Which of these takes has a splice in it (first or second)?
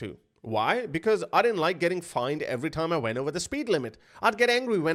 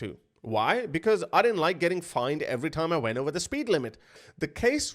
second